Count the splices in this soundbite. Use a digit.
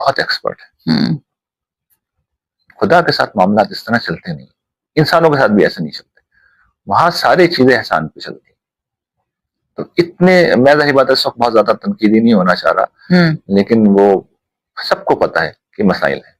0